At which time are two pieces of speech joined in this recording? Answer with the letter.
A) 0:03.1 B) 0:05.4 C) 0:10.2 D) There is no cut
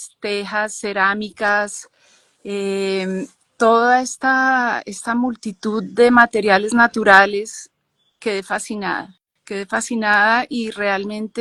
D